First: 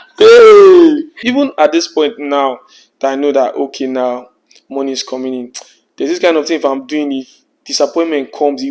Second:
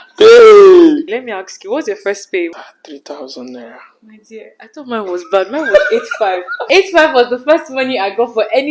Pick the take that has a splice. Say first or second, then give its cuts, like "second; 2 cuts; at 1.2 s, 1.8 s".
second; 2 cuts; at 1.1 s, 6.6 s